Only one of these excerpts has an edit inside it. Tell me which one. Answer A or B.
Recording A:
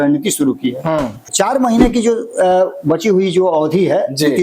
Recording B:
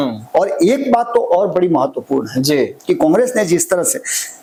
A